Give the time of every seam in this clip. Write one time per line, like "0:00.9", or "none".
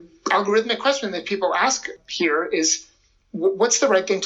0:01.9